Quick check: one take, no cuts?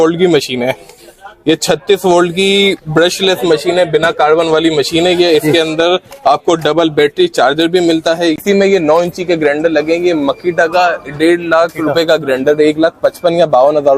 no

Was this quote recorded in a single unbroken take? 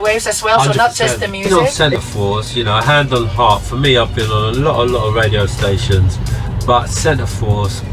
no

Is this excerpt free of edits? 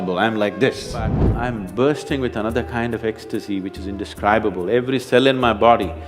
no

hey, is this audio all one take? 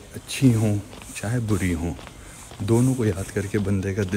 yes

